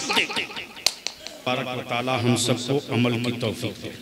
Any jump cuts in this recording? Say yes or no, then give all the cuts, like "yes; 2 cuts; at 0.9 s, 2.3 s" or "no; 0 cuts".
yes; 1 cut; at 1.5 s